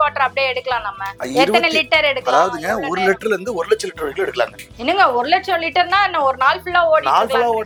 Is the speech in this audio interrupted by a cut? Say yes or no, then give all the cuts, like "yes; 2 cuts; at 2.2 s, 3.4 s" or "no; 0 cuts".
no; 0 cuts